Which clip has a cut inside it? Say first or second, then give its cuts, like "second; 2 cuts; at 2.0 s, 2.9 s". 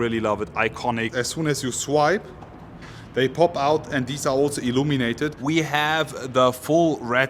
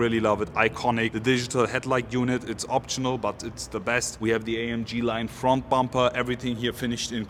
first; 2 cuts; at 1.1 s, 5.4 s